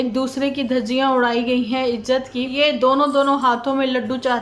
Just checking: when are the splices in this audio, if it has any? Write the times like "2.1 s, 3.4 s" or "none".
2.5 s